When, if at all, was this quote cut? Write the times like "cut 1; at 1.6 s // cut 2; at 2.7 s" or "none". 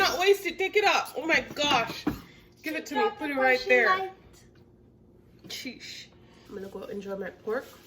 cut 1; at 6.4 s